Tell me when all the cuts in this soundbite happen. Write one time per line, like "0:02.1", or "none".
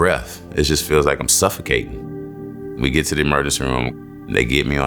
0:02.1
0:03.9